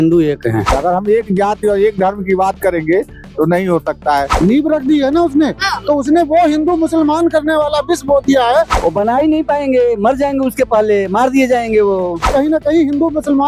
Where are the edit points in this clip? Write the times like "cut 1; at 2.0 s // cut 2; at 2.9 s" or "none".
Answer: cut 1; at 0.8 s // cut 2; at 4.3 s // cut 3; at 8.7 s // cut 4; at 12.3 s